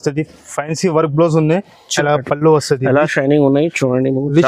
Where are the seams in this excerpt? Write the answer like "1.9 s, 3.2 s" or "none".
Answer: 1.8 s